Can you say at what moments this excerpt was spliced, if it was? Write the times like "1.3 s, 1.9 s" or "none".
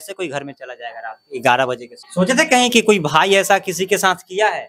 2.0 s